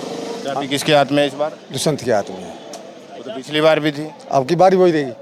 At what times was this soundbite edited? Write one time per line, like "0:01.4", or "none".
none